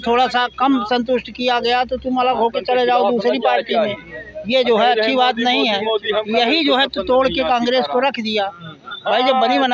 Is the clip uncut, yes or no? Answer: yes